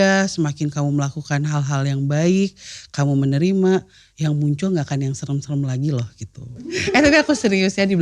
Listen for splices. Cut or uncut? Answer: cut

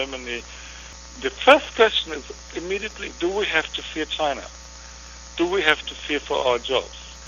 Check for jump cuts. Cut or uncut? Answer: uncut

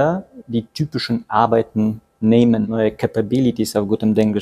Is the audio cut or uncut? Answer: cut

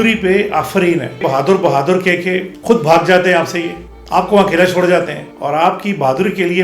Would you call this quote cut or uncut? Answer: cut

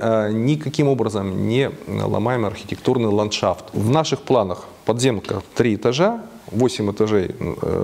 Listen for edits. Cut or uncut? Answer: cut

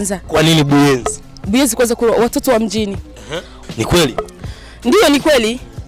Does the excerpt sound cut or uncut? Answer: cut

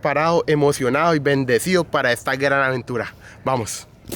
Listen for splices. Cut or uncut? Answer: uncut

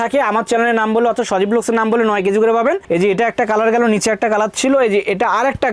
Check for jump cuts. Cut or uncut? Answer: uncut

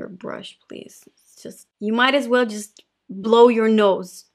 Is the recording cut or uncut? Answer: uncut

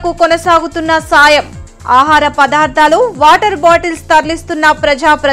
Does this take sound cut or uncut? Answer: uncut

